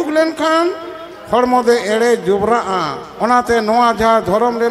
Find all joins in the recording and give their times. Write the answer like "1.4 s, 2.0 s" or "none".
3.0 s